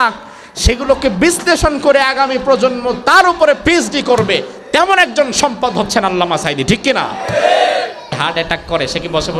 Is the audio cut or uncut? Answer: cut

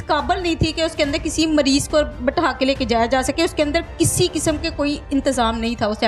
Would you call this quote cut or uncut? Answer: uncut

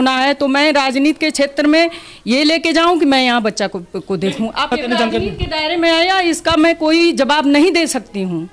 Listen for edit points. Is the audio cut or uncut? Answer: cut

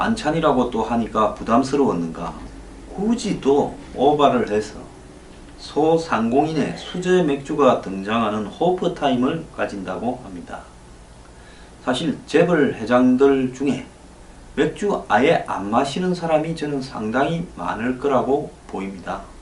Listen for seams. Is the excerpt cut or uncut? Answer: uncut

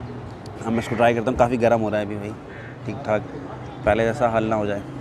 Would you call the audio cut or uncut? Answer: uncut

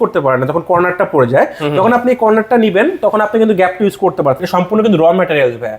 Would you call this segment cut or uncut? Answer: cut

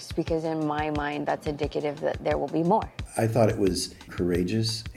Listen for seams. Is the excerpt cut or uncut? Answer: cut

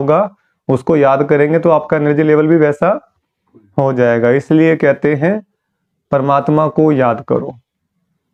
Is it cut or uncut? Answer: uncut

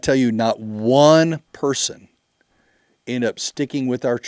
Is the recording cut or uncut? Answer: uncut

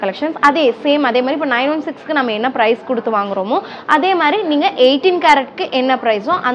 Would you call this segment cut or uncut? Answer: uncut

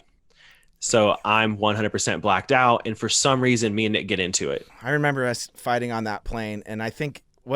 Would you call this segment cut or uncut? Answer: cut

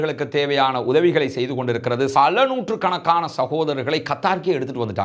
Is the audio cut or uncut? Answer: cut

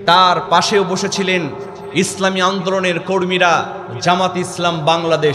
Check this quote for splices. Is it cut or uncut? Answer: uncut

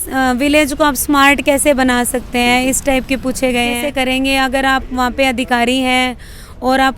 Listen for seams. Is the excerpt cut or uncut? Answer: cut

